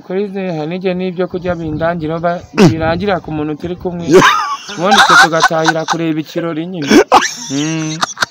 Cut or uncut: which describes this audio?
uncut